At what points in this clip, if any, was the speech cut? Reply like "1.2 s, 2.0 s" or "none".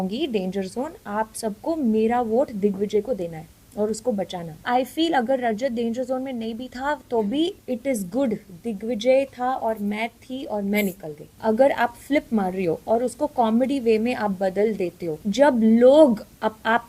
4.6 s, 7.6 s, 11.3 s, 15.2 s